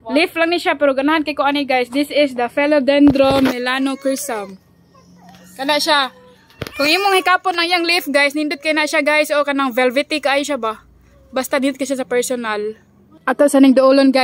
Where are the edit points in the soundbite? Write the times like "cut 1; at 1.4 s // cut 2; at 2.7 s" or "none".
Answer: cut 1; at 13.1 s